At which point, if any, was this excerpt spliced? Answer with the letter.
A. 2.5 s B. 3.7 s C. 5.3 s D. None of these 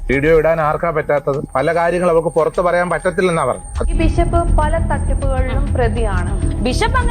B